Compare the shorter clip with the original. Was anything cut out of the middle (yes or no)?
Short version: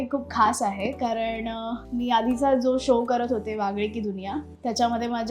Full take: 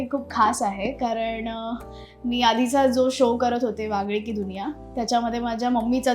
yes